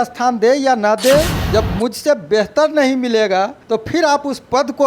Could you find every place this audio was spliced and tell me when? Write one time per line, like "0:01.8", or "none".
0:01.4
0:03.6